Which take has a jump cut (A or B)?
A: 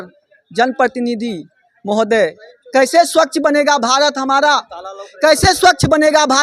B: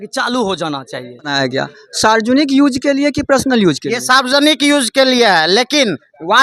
B